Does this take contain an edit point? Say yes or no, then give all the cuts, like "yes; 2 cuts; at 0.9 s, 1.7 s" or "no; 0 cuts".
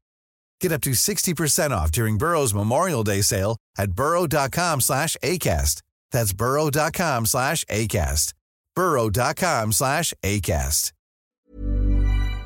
yes; 1 cut; at 11.3 s